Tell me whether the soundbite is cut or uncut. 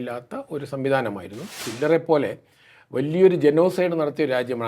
cut